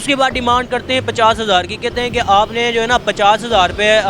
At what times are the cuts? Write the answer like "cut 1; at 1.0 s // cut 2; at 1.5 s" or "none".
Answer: none